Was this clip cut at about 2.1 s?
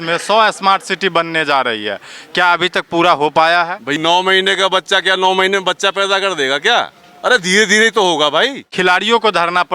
no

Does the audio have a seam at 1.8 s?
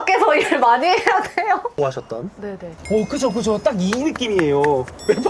yes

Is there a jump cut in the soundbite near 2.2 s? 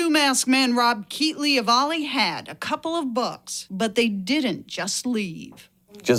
no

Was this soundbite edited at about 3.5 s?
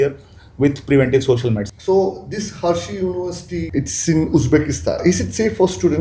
yes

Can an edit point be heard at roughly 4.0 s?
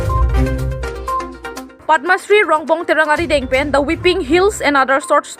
no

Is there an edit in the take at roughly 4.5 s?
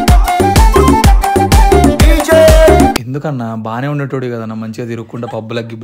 no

